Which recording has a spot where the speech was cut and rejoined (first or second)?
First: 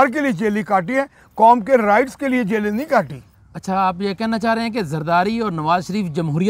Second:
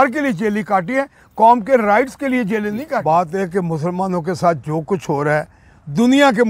second